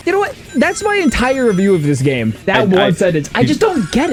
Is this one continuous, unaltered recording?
yes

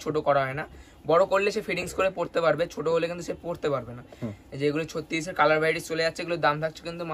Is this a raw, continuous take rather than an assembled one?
yes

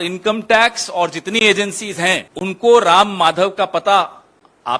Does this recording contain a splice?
yes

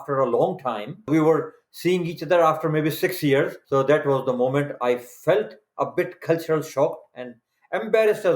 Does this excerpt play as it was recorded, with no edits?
no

